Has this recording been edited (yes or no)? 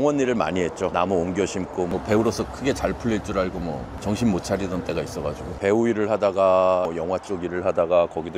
yes